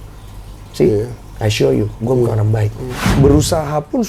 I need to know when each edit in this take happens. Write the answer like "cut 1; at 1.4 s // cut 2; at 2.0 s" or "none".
cut 1; at 3.0 s